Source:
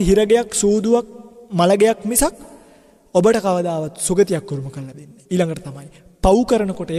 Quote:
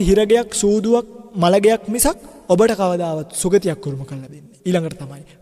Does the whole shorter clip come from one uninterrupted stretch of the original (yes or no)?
no